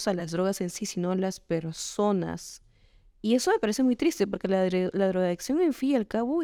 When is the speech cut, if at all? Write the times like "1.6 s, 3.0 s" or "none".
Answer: none